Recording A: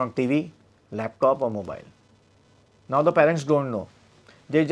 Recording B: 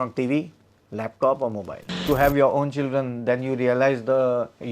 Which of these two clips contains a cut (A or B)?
B